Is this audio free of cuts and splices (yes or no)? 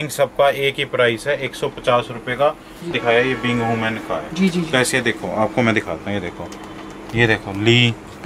no